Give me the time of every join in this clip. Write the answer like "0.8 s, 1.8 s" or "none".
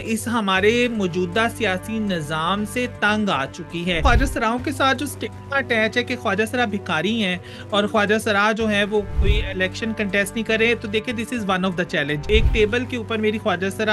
4.0 s, 9.1 s, 12.2 s